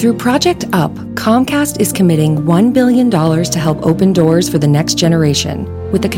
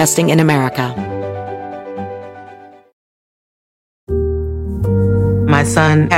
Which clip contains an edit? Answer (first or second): second